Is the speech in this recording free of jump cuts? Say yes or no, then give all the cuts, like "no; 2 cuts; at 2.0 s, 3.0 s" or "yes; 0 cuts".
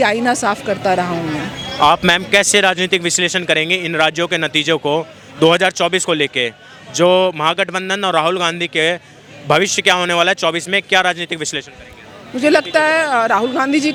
yes; 0 cuts